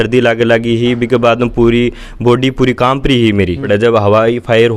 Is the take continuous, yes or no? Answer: no